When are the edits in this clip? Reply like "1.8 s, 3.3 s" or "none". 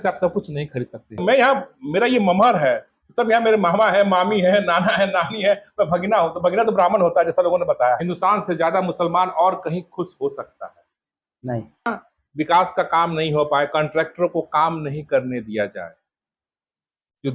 1.2 s, 8.0 s, 11.9 s